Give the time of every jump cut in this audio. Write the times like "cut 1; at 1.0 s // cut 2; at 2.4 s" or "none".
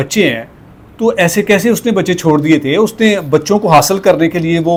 none